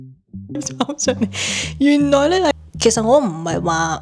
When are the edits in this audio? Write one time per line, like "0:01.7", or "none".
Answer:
0:02.5

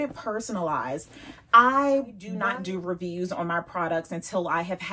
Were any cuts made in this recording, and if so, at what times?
0:02.3

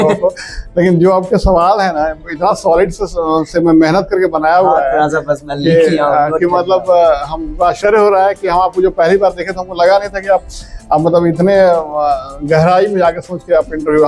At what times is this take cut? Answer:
none

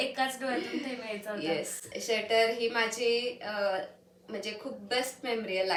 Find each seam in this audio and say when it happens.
none

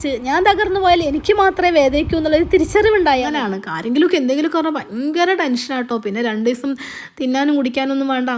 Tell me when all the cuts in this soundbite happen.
0:03.3

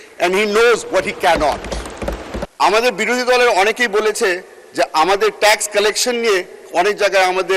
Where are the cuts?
0:02.4

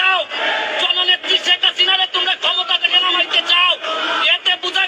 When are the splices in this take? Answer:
none

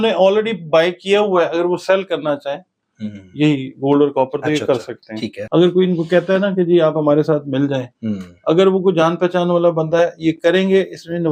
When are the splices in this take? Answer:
0:05.3

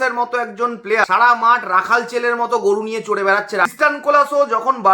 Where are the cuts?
0:01.0
0:03.7

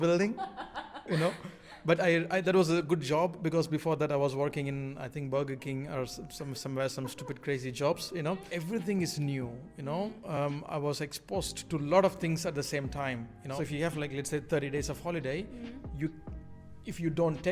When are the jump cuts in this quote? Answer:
0:08.5
0:13.6

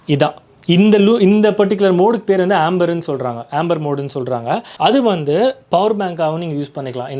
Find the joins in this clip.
0:04.7

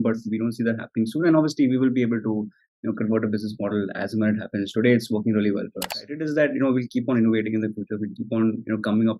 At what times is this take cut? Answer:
0:06.2

